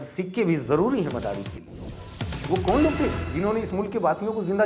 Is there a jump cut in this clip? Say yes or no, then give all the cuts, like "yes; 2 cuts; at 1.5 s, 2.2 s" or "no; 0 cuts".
yes; 1 cut; at 1.9 s